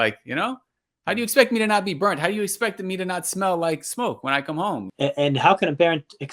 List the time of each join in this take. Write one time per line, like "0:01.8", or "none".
0:04.9